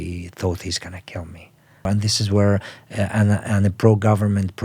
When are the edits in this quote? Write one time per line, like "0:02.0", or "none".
0:01.9